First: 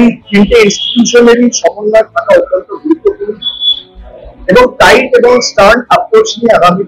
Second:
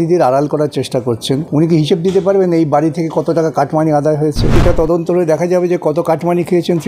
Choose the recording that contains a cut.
second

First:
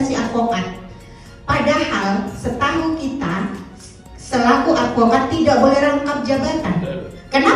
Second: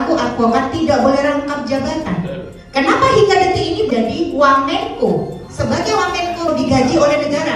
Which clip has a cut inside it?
second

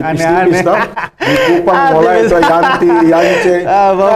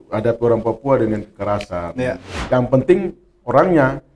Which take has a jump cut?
second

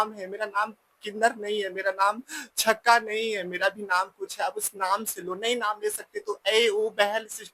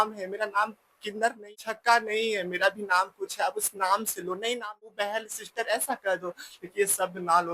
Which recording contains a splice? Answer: second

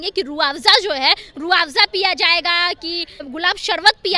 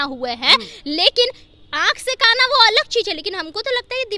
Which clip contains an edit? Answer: first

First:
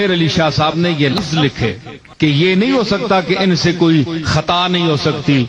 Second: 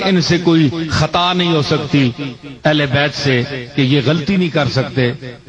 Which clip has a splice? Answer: first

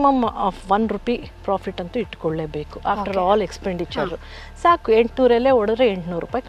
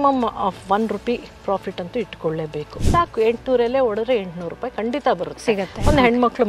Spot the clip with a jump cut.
second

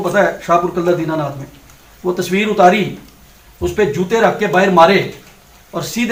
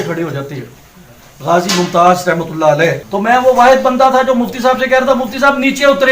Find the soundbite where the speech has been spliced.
second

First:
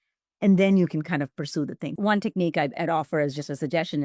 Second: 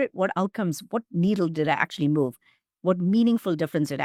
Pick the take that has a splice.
first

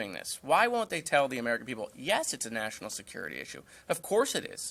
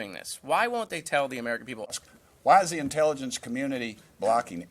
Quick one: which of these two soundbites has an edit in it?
second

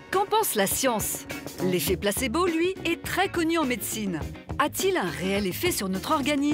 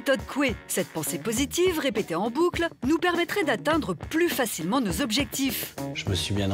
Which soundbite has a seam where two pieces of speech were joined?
second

